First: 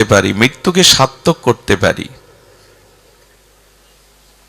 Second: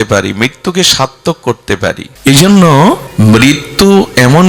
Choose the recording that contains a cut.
second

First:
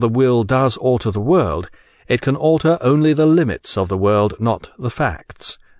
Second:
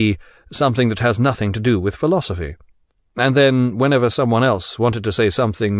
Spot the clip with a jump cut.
first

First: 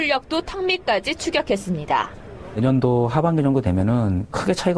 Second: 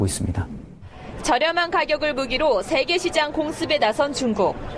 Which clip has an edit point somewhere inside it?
first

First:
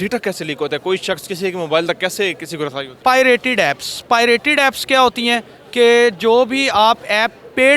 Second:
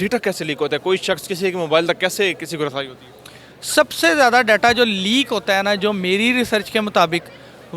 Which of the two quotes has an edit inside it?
first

